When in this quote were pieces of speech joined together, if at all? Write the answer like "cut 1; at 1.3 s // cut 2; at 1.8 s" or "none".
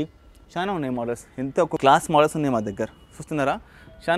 cut 1; at 1.8 s